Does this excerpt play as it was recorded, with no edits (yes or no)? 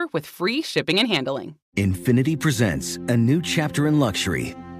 no